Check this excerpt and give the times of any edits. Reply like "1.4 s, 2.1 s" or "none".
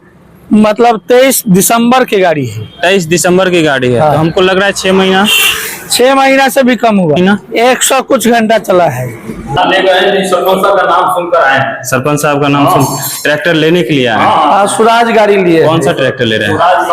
7.2 s, 9.6 s